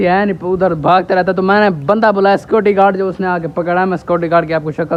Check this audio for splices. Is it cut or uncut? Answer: uncut